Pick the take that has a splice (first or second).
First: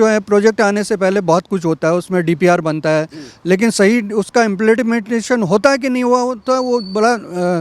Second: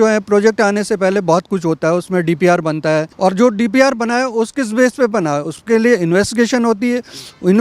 second